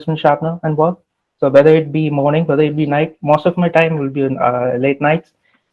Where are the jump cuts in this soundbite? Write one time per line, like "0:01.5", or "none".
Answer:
none